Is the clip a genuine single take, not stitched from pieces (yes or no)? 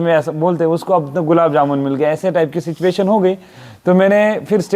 yes